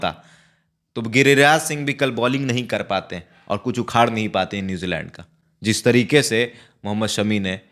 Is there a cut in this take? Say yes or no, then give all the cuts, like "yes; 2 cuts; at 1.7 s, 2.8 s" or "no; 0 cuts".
no; 0 cuts